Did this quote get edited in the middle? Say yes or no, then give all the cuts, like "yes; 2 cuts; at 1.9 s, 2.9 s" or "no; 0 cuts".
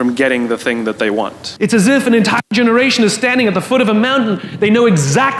yes; 1 cut; at 1.4 s